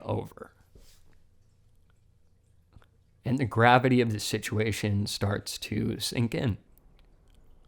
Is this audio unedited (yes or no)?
no